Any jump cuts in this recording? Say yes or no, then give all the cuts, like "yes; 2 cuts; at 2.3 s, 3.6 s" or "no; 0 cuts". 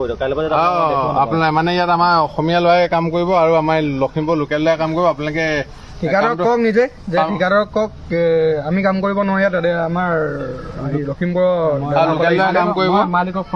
no; 0 cuts